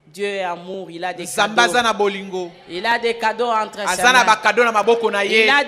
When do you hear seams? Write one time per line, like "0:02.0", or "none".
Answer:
none

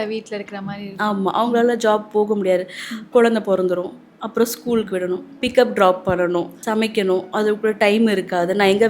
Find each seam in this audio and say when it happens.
0:06.6

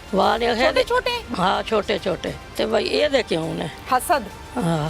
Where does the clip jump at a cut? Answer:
0:02.4
0:03.8

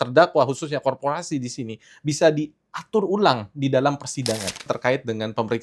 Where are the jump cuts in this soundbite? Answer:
0:04.6

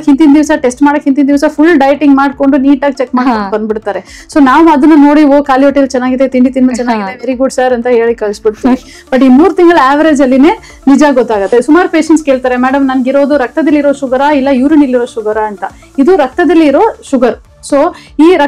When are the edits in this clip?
0:11.5

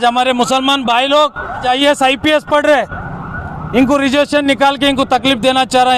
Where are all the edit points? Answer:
0:01.6

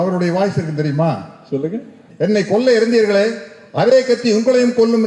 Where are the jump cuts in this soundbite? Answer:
0:02.0

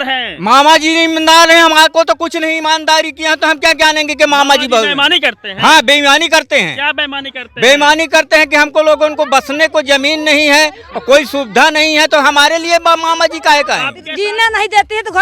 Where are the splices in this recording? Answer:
0:14.0

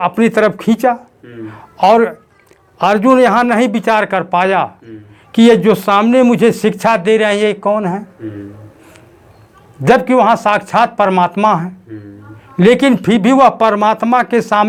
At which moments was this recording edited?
none

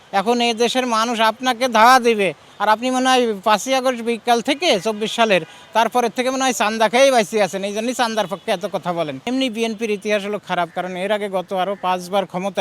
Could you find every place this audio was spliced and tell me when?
0:09.2

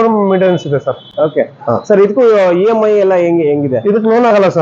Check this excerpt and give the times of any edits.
none

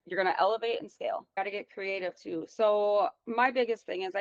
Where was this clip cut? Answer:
0:01.4

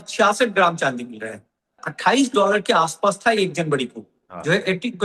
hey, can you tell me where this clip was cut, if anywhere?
0:01.8

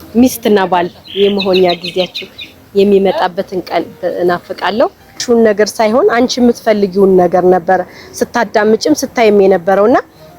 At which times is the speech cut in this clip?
0:05.2

